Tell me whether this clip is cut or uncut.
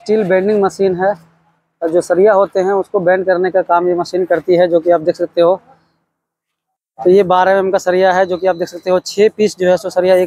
uncut